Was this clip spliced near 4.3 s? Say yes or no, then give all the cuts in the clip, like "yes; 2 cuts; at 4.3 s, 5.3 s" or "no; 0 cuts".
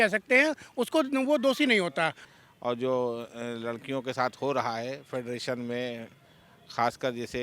no; 1 cut; at 2.2 s